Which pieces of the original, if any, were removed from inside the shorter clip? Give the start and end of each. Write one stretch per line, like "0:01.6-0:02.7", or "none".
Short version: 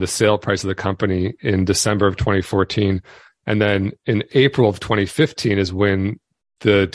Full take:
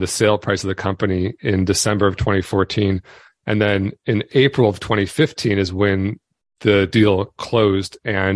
none